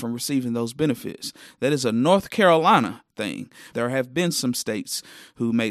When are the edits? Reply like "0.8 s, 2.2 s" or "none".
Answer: 3.6 s